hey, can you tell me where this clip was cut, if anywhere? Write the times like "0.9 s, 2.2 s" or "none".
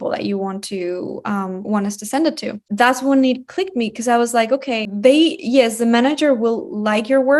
2.6 s, 4.9 s